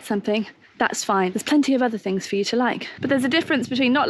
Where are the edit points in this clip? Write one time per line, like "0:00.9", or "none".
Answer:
0:02.9